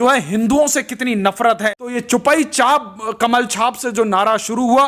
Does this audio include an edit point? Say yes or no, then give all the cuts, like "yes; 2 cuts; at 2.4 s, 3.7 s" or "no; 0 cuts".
yes; 1 cut; at 2.0 s